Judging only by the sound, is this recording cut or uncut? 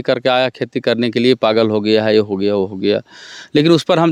uncut